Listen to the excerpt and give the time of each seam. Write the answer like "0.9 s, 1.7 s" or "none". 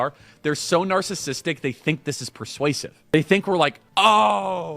3.1 s, 3.8 s

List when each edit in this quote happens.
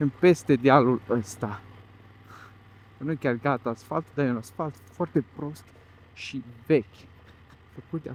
none

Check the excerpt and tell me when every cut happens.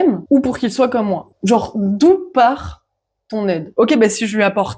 1.3 s, 3.7 s

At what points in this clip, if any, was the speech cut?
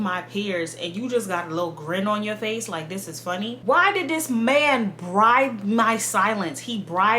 3.6 s

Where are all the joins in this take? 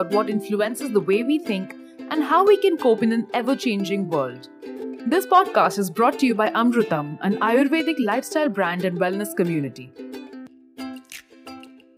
9.8 s

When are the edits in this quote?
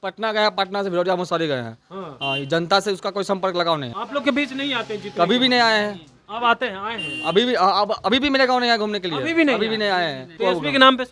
3.9 s, 10.3 s

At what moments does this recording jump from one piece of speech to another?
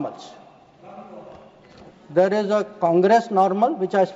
none

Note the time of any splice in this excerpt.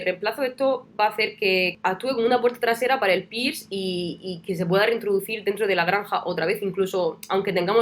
1.7 s

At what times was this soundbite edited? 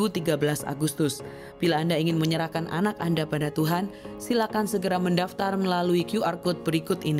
none

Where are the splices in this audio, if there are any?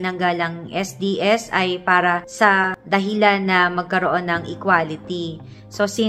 none

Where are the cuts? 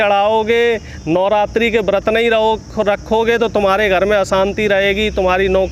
none

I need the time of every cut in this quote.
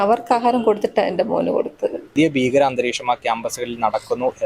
2.1 s

